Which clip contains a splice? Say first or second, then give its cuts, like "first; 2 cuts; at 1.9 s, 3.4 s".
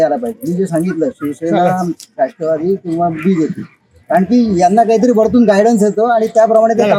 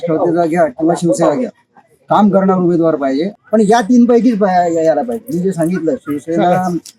second; 1 cut; at 3.3 s